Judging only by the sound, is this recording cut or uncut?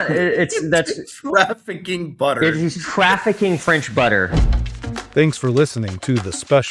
cut